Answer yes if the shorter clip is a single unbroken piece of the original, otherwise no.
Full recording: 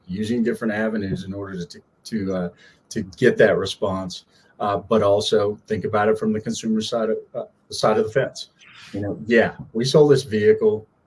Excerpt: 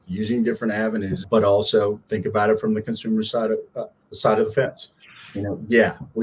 no